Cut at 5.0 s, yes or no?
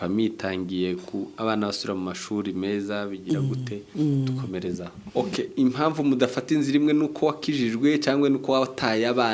yes